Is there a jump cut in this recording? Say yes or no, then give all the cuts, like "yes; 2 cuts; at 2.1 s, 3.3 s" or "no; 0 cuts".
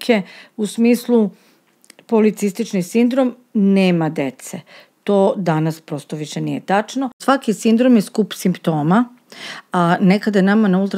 yes; 1 cut; at 7.1 s